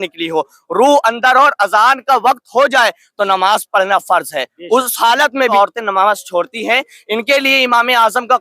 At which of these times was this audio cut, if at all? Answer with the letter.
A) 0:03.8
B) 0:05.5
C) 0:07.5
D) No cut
B